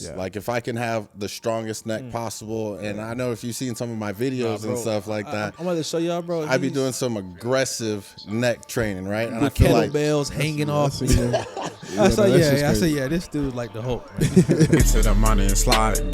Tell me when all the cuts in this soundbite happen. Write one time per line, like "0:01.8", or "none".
0:14.8